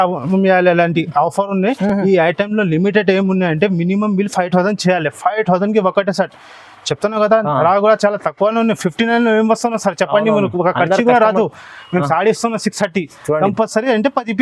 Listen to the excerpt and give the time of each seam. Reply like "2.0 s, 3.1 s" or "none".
none